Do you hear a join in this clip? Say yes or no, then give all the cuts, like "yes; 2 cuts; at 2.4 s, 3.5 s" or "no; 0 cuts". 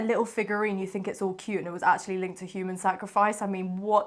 no; 0 cuts